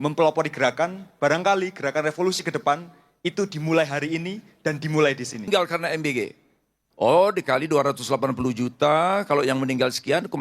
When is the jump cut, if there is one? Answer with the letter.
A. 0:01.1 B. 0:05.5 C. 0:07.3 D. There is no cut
B